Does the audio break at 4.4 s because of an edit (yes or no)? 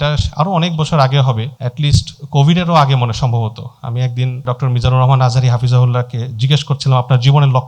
yes